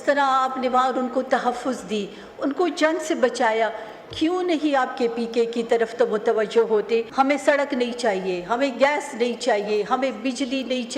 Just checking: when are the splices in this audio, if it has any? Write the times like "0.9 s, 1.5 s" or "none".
7.1 s